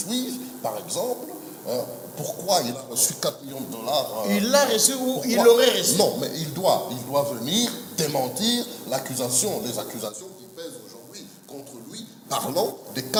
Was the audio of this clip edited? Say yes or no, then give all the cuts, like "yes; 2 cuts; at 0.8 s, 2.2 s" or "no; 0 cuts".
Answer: no; 0 cuts